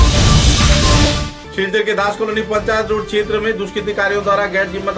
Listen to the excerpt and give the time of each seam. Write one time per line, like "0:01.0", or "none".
0:01.0